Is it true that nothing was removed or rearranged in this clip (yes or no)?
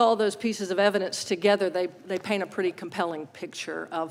yes